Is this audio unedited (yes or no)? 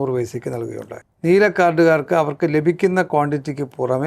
no